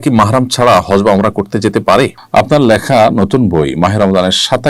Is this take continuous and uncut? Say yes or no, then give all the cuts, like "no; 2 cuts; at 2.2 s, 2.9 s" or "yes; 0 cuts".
no; 1 cut; at 2.2 s